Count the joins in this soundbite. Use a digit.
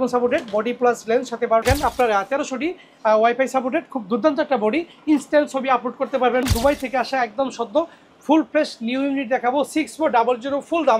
2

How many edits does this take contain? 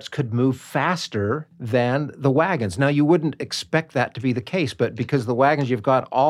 1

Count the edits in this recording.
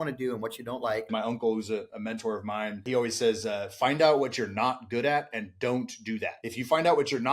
3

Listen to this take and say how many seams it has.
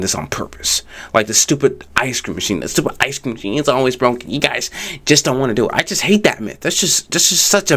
0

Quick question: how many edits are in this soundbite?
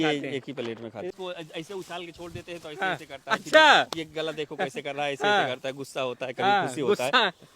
1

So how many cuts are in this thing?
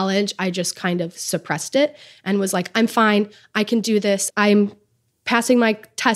2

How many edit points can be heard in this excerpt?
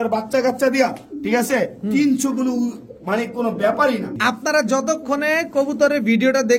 1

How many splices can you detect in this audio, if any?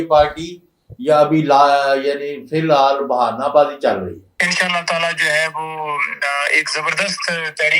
1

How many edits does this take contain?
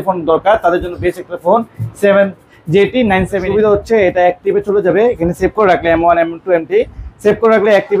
1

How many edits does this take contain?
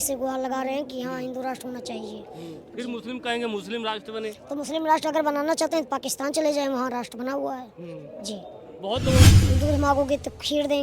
1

